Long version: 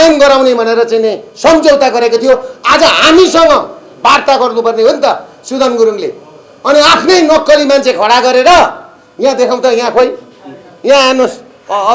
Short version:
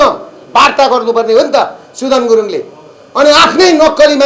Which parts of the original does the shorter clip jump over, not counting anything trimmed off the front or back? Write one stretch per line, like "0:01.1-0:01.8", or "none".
none